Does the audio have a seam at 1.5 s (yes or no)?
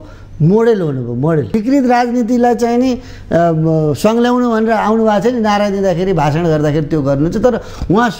yes